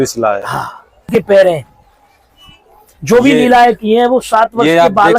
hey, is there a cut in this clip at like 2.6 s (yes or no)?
no